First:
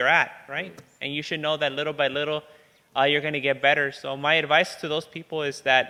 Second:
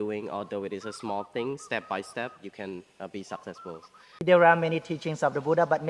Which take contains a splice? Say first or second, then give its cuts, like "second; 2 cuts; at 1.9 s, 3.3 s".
second; 1 cut; at 4.2 s